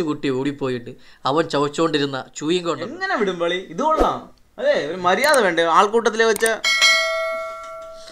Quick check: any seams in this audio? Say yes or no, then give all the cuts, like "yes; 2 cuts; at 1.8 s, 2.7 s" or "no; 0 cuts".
yes; 1 cut; at 2.9 s